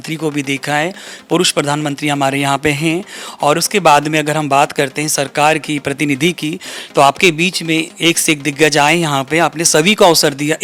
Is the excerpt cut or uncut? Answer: uncut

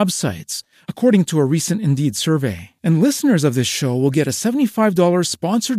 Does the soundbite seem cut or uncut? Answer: uncut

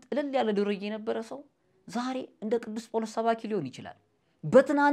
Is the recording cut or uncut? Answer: uncut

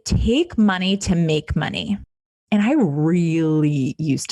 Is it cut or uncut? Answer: uncut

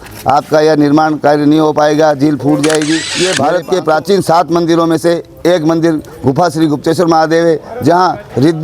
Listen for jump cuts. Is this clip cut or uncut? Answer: cut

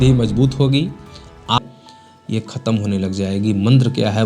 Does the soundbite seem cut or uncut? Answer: cut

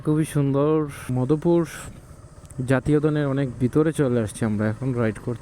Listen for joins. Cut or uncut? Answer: cut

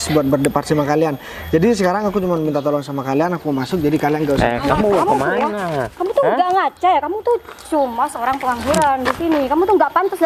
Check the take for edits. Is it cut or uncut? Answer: uncut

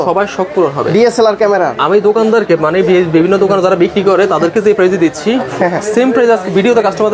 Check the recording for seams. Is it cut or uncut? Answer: uncut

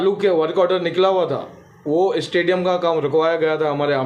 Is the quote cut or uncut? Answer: uncut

